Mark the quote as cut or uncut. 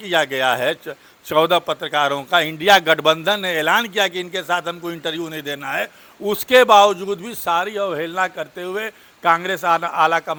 uncut